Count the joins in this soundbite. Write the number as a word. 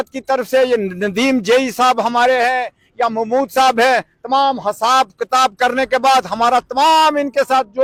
zero